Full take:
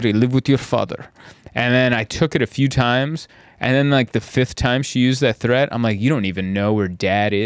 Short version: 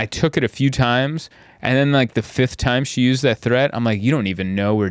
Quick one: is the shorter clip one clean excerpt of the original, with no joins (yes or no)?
yes